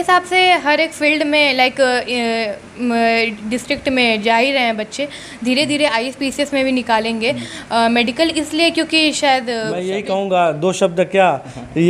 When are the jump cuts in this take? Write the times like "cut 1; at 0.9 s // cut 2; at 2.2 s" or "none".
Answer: cut 1; at 9.9 s